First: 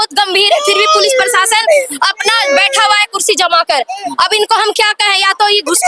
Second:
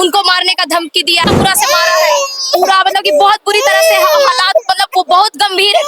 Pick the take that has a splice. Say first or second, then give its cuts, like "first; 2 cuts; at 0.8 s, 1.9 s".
second; 1 cut; at 1.3 s